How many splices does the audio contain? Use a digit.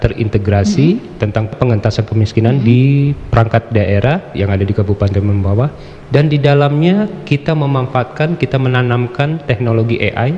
1